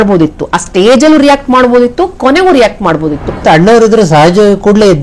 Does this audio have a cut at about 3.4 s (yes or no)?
yes